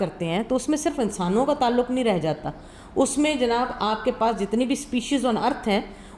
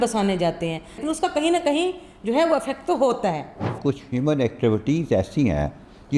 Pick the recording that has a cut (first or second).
second